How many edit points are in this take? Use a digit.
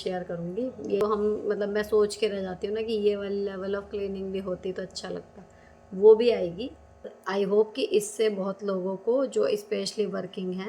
2